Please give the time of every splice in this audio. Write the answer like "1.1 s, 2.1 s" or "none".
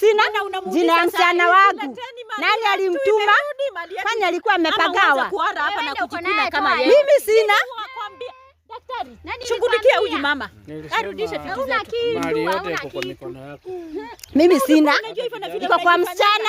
none